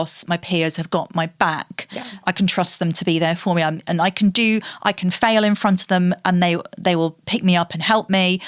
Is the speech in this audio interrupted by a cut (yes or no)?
no